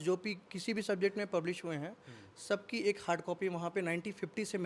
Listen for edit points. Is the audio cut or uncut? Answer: uncut